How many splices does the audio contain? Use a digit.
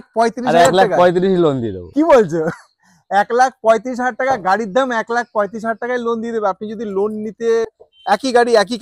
1